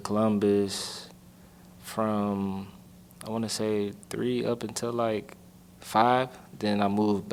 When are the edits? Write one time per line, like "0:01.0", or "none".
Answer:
none